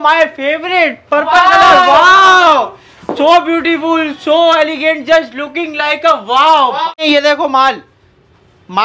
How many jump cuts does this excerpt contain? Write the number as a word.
one